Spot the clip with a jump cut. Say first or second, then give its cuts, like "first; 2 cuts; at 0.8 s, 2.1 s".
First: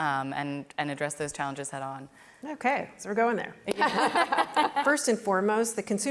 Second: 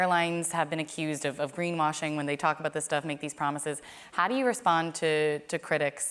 first; 1 cut; at 4.8 s